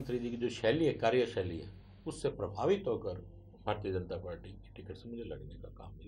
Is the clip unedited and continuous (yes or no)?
yes